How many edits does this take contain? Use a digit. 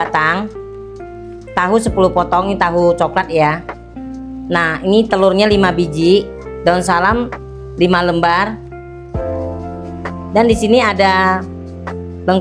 2